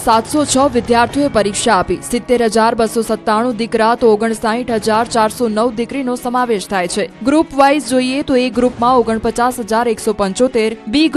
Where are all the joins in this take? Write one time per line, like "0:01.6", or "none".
none